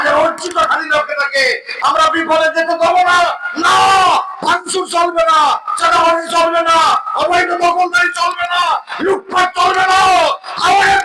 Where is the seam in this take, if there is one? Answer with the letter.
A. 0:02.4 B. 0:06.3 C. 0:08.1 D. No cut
D